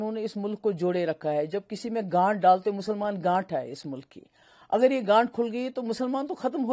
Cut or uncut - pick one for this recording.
uncut